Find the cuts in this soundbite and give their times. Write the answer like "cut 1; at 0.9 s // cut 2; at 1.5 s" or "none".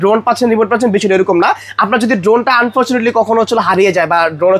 none